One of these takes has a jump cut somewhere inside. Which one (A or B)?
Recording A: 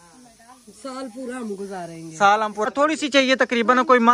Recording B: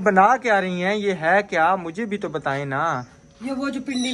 A